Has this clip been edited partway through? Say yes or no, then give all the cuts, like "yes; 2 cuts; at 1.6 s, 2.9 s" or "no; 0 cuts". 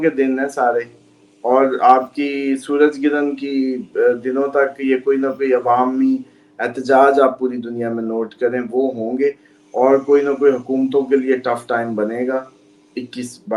no; 0 cuts